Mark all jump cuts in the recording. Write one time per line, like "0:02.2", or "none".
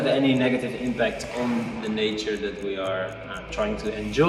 none